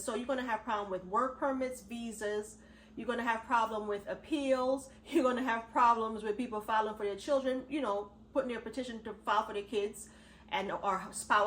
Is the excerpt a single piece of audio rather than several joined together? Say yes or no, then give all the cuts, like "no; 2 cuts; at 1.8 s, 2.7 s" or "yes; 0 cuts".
yes; 0 cuts